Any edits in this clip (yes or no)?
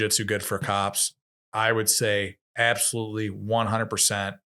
no